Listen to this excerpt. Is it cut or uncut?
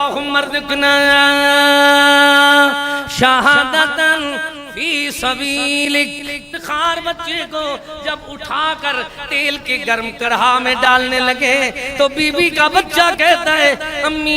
cut